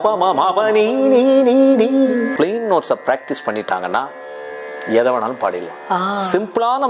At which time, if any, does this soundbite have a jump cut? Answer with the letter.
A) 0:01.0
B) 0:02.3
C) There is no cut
B